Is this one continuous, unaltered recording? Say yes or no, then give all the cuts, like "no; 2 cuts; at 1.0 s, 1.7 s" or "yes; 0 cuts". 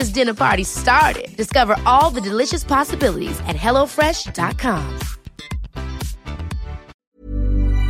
no; 1 cut; at 7.0 s